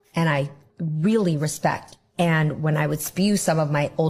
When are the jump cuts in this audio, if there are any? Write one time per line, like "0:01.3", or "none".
0:02.9